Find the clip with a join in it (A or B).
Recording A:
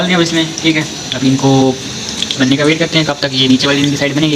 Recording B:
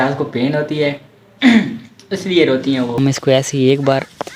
B